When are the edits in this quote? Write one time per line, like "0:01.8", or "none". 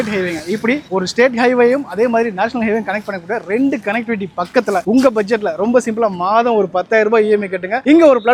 none